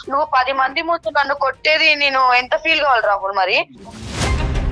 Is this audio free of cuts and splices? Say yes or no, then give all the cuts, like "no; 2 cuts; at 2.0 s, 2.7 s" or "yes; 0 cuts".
no; 1 cut; at 3.7 s